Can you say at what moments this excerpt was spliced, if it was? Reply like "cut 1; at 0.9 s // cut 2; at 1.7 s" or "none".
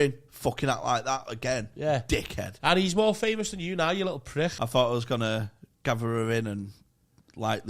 cut 1; at 4.6 s